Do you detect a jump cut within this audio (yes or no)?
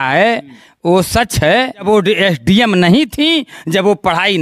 yes